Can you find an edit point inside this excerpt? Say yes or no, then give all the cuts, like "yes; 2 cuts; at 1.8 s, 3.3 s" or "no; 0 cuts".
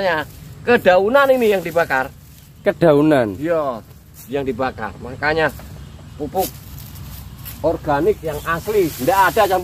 no; 0 cuts